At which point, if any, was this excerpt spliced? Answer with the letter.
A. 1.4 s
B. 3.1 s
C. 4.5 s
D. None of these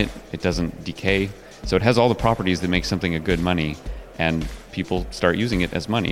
D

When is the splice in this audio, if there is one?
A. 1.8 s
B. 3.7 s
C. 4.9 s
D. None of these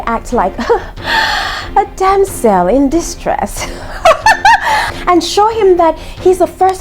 C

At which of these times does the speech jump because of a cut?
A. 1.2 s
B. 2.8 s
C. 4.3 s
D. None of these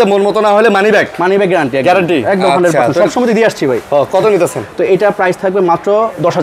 D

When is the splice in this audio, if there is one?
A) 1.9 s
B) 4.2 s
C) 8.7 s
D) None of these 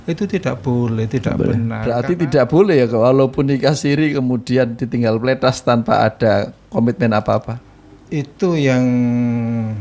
A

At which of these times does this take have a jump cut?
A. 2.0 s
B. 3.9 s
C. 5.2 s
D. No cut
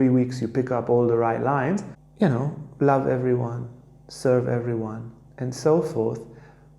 A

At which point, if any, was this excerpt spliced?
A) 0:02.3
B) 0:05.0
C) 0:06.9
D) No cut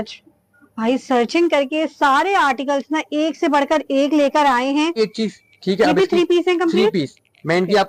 B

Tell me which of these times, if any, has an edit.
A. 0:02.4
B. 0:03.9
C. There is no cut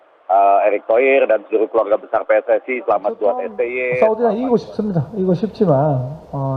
B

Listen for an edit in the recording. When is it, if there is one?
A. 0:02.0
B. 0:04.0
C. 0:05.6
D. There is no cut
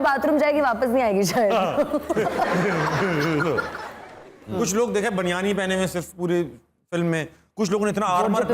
D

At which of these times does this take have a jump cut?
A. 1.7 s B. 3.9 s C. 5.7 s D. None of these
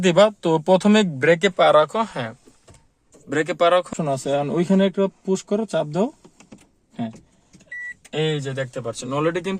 B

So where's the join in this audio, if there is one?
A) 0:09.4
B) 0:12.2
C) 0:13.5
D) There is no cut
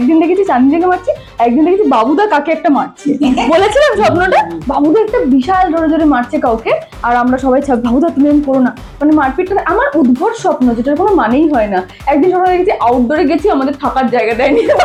D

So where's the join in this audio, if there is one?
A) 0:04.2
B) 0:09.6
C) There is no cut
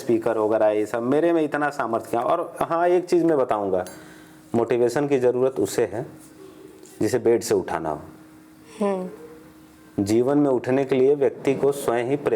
C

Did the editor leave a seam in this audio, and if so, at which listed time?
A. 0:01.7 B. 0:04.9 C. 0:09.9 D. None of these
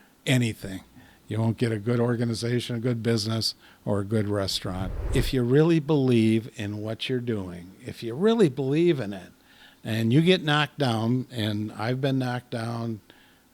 B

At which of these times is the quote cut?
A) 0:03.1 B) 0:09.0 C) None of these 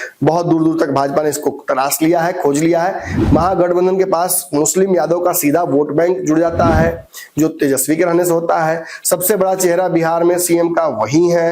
A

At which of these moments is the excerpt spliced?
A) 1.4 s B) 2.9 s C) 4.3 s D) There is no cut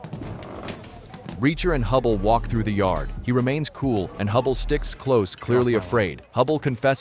D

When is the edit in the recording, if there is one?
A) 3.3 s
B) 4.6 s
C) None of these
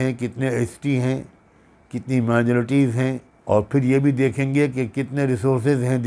A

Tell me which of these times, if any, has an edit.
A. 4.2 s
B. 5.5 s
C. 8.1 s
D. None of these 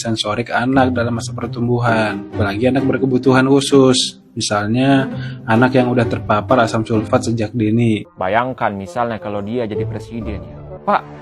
C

